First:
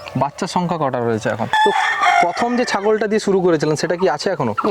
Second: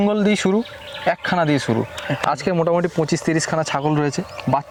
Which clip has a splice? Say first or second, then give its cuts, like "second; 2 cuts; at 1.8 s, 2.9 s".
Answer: first; 1 cut; at 1.5 s